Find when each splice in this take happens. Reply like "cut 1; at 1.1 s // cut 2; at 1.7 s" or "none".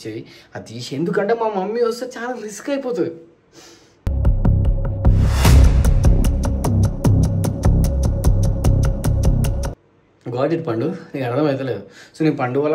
none